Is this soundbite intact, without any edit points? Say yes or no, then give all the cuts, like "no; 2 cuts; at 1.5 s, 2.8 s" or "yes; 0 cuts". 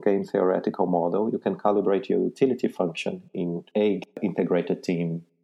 no; 1 cut; at 4.0 s